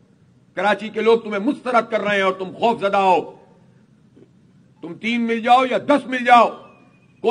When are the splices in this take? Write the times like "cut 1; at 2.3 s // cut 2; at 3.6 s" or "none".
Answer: none